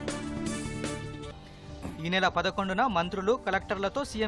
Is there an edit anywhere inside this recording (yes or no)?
yes